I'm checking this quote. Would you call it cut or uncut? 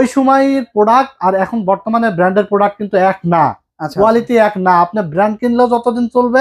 uncut